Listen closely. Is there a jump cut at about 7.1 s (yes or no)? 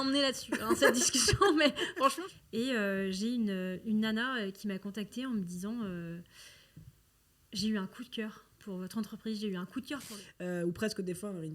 no